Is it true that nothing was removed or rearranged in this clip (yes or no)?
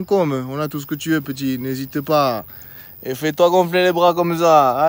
yes